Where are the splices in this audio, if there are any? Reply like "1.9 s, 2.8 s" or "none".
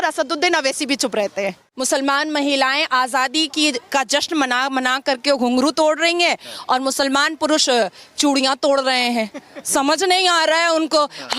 1.7 s